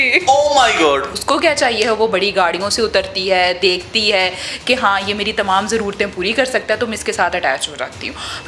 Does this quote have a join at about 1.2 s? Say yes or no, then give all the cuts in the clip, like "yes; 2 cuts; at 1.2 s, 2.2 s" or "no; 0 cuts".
yes; 1 cut; at 1.2 s